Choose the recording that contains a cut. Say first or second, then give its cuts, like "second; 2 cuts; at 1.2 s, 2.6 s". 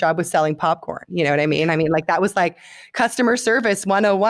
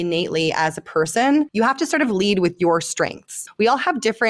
second; 2 cuts; at 1.5 s, 3.4 s